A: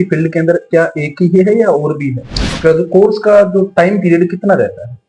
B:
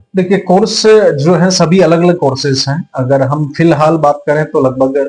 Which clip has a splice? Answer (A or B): A